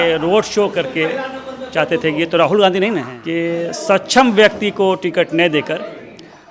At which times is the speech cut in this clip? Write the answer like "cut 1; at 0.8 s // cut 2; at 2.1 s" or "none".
cut 1; at 3.1 s